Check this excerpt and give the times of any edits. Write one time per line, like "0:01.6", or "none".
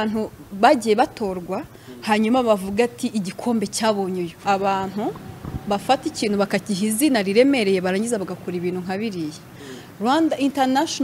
0:04.4